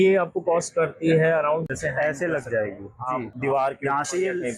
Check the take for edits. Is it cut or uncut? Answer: cut